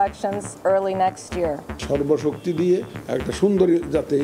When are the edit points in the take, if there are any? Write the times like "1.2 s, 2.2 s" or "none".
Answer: 1.8 s